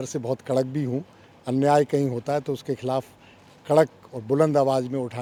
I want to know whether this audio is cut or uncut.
uncut